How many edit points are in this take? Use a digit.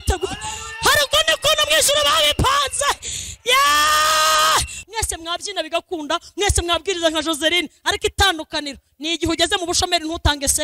1